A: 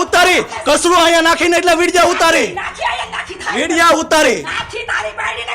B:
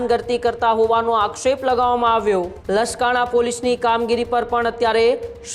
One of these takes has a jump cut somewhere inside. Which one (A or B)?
B